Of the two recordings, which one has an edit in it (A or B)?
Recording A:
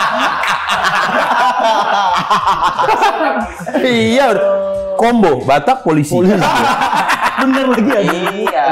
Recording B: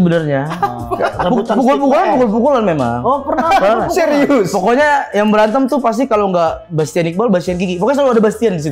A